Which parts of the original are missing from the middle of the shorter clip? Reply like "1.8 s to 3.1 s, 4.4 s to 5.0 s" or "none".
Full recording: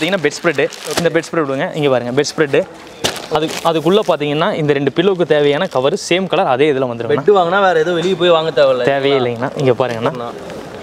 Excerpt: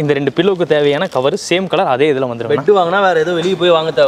none